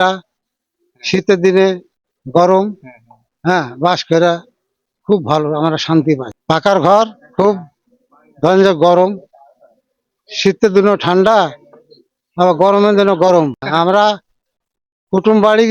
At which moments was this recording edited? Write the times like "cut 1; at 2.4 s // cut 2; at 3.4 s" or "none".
cut 1; at 6.3 s // cut 2; at 13.6 s